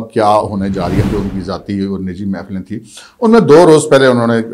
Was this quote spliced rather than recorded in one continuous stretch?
yes; 1 cut; at 1.1 s

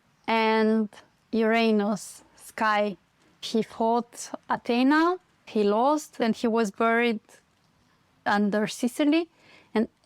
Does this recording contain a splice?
yes; 3 cuts; at 5.3 s, 6.2 s, 8.3 s

